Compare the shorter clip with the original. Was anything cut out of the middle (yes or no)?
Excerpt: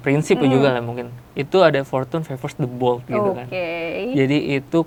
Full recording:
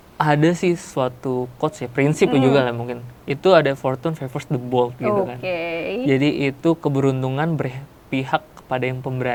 no